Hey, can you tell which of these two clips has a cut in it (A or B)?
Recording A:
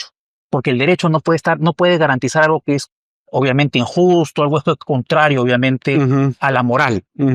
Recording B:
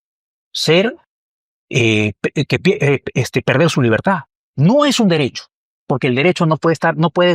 B